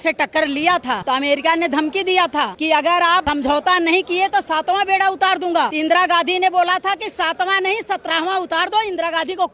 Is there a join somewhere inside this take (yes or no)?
yes